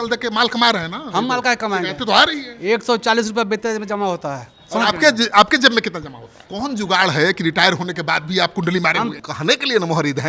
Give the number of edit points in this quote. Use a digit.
2